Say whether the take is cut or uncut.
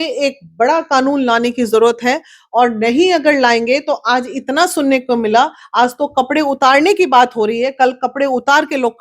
uncut